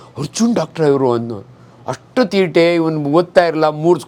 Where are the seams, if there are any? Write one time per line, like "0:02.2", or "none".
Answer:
none